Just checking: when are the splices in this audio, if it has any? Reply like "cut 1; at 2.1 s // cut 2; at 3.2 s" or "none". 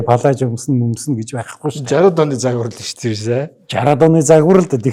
none